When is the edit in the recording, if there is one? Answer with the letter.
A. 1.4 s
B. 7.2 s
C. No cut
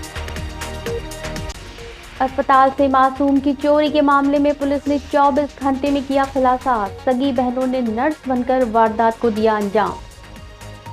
A